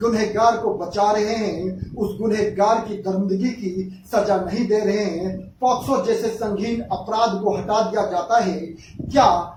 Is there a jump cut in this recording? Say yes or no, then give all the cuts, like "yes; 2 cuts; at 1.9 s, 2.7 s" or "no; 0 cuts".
no; 0 cuts